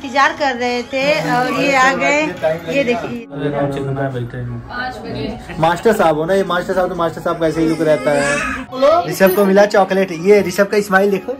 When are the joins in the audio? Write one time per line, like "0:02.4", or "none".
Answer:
0:03.3
0:08.7